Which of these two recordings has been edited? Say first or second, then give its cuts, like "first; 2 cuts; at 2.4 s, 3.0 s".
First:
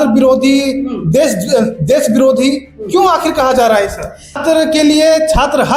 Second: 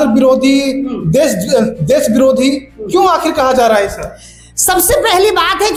first; 1 cut; at 4.4 s